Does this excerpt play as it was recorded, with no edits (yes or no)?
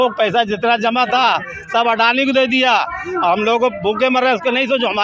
yes